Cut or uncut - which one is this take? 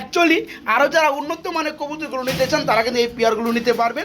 uncut